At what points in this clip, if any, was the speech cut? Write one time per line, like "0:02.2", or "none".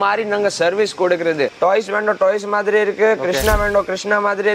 0:01.5